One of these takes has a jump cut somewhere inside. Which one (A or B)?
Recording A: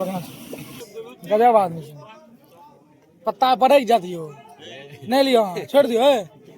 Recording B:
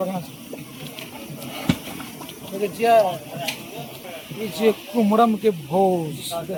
A